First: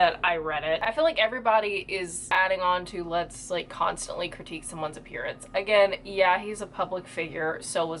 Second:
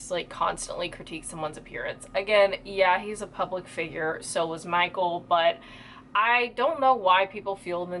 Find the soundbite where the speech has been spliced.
first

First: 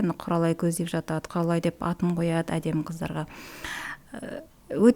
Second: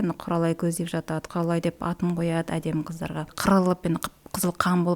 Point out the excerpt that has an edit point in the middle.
second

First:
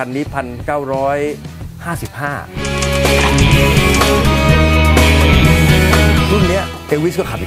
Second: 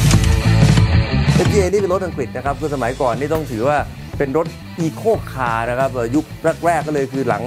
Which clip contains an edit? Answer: first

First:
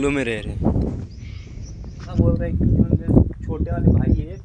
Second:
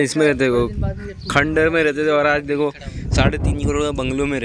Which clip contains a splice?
first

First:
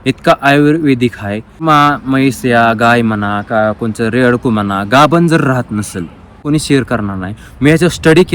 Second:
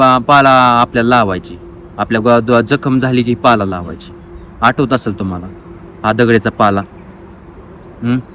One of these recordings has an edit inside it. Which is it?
first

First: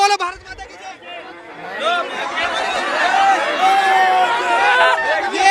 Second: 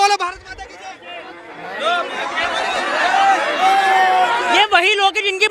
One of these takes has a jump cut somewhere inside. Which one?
second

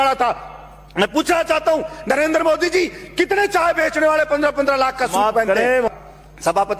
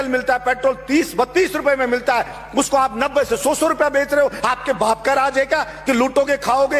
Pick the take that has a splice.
first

